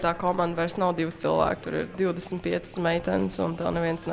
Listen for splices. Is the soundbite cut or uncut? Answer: uncut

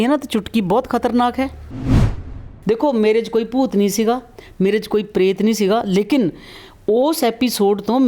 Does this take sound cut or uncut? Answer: cut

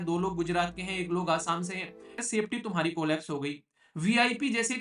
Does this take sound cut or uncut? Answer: cut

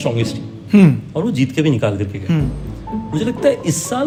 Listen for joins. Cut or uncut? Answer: uncut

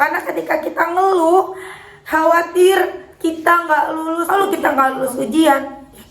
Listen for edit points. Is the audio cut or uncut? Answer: cut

